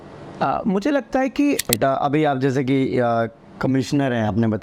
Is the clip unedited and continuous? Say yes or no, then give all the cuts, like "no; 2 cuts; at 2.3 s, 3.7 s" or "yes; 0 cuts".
no; 1 cut; at 1.6 s